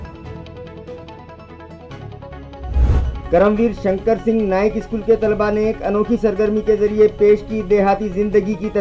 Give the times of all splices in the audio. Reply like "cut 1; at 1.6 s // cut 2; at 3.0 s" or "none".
none